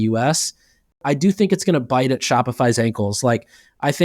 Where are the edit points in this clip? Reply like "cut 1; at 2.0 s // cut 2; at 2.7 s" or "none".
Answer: cut 1; at 1.0 s